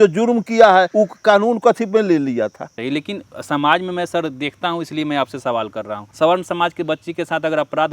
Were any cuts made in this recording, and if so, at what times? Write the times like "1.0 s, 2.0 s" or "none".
0.9 s, 2.7 s, 6.0 s